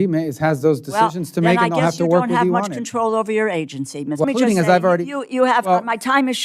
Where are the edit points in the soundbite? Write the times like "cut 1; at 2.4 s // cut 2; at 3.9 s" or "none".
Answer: cut 1; at 4.2 s